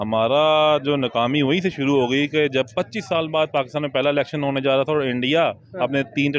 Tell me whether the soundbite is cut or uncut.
uncut